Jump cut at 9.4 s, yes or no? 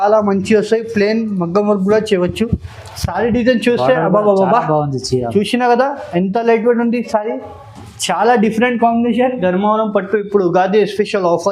yes